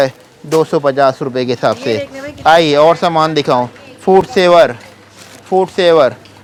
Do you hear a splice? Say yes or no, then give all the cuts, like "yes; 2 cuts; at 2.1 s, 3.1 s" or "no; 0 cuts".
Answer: no; 0 cuts